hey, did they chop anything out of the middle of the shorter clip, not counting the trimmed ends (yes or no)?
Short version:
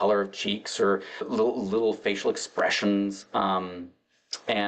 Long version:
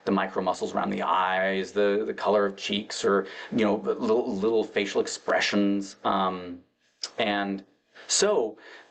yes